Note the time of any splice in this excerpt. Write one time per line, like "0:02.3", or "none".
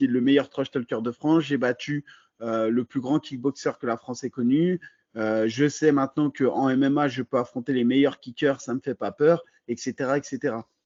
none